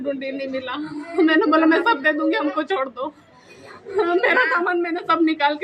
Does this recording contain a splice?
no; 0 cuts

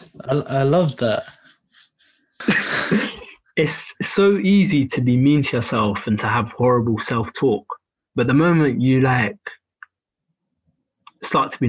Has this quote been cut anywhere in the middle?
yes; 1 cut; at 2.4 s

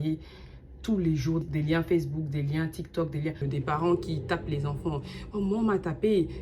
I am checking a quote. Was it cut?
yes; 2 cuts; at 1.5 s, 3.5 s

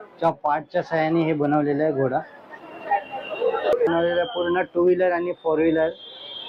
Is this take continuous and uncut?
no; 1 cut; at 3.7 s

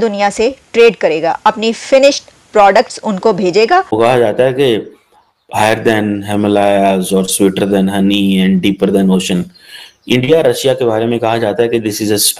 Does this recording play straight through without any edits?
no; 1 cut; at 3.9 s

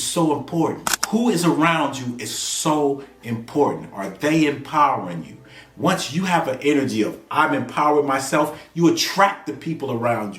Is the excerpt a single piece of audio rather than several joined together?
no; 1 cut; at 0.9 s

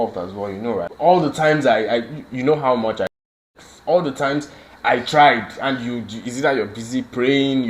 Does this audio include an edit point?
yes; 1 cut; at 0.9 s

